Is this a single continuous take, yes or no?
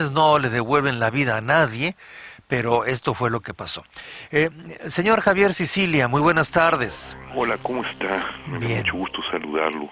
yes